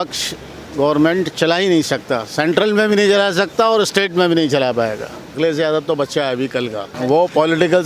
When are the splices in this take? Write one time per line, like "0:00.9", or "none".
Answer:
0:05.4
0:06.9